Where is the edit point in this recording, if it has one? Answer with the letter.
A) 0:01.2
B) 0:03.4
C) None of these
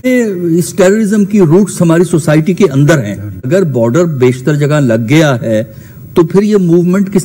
B